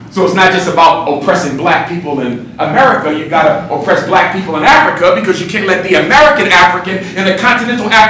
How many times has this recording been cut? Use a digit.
0